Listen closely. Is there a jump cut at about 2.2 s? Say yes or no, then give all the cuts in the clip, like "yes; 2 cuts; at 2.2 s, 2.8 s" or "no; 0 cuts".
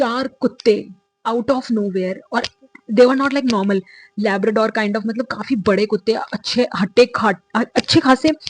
no; 0 cuts